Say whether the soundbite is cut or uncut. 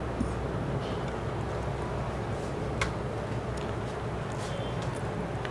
cut